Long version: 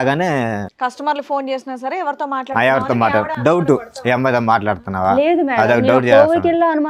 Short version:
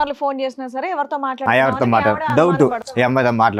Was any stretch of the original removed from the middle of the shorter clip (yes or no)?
no